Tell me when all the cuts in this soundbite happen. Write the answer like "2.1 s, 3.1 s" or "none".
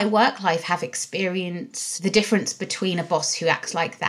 1.8 s